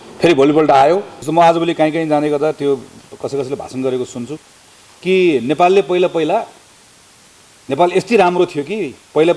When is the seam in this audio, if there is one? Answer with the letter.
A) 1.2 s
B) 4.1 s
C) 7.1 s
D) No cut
A